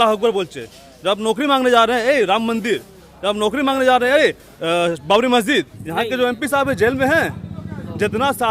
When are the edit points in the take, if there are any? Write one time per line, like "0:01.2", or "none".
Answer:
0:05.8